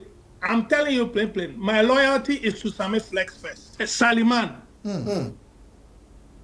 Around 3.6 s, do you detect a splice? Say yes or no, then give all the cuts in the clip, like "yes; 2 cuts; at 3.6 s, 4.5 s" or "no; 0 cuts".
yes; 1 cut; at 3.6 s